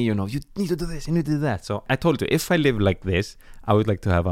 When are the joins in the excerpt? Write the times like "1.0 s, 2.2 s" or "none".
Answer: 1.9 s